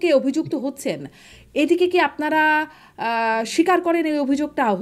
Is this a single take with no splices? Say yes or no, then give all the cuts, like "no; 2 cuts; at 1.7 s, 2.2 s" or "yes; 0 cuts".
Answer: yes; 0 cuts